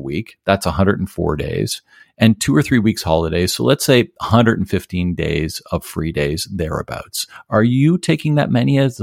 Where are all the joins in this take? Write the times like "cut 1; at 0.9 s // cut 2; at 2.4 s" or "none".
none